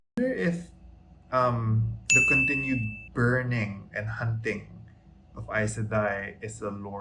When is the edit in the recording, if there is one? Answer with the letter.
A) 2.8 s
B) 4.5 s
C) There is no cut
C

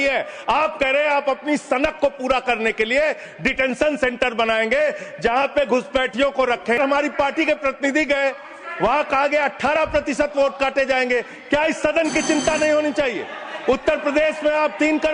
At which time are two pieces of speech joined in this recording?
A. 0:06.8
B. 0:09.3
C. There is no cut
A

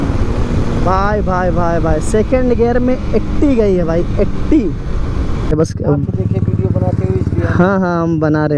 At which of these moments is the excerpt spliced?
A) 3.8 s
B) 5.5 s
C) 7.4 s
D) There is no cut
B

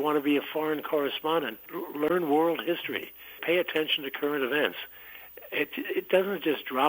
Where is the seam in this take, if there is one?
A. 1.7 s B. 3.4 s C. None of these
B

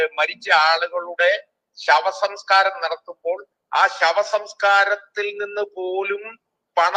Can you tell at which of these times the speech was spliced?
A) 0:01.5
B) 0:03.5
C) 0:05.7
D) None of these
D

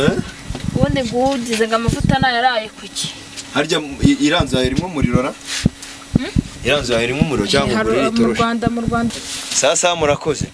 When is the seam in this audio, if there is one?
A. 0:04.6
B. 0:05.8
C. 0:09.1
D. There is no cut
C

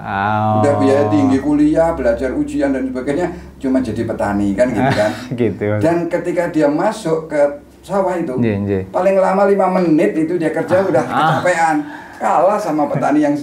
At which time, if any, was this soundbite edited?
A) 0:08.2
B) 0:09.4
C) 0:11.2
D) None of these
D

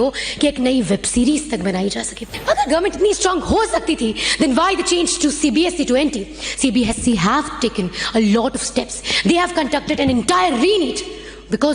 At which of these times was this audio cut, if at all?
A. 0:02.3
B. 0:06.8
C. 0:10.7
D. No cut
A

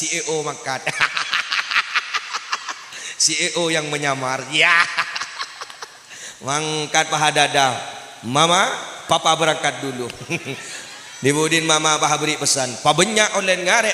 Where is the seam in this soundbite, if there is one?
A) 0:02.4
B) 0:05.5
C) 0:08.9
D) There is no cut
D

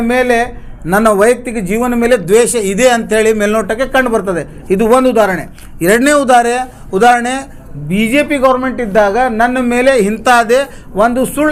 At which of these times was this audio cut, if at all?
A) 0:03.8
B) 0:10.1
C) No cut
C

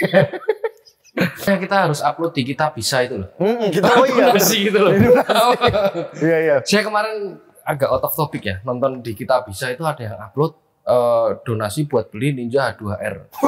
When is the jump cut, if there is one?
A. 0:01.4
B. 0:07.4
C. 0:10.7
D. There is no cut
A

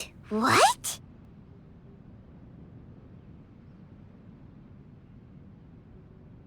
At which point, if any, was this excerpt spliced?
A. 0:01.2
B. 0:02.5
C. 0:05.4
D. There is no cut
A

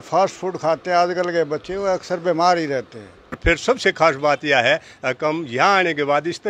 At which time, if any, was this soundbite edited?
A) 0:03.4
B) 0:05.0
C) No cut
A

